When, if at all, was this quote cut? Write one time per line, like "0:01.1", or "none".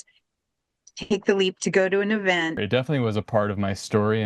0:02.6

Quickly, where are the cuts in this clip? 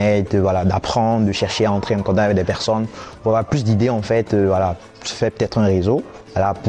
none

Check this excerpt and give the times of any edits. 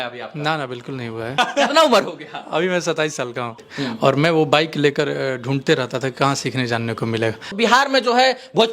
0:01.4
0:03.7
0:07.5

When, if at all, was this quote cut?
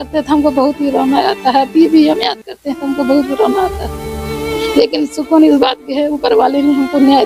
none

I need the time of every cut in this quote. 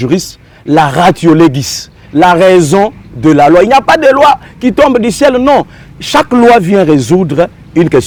none

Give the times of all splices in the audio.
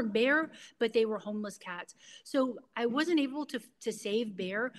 none

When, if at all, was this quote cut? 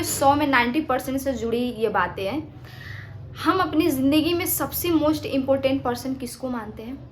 none

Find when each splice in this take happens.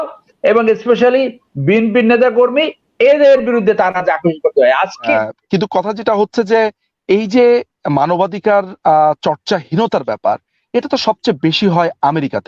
0:05.1

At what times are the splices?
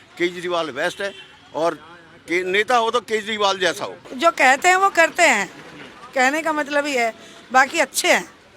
0:04.1

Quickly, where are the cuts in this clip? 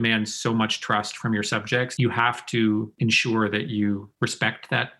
0:01.9
0:02.9
0:04.1

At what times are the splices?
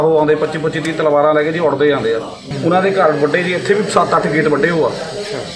0:02.5

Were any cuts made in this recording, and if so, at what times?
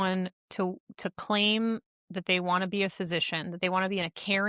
none

